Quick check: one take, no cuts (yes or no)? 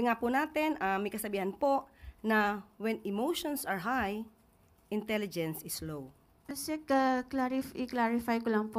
no